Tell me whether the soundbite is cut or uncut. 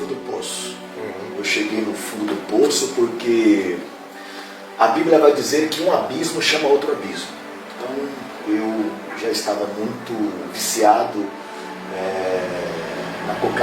uncut